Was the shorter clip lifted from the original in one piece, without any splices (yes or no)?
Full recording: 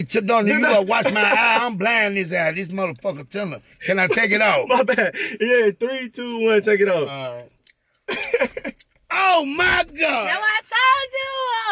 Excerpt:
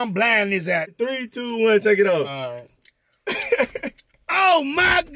no